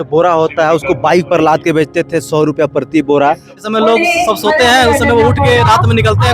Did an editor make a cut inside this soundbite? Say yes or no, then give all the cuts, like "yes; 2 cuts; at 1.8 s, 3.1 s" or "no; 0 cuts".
yes; 1 cut; at 3.5 s